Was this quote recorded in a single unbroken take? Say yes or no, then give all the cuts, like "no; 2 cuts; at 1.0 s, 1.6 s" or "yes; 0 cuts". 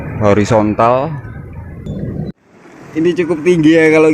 no; 1 cut; at 1.9 s